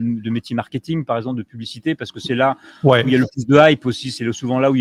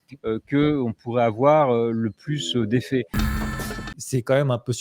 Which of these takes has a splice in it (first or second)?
second